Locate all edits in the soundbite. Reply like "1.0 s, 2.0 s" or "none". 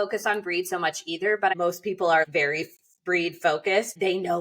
1.5 s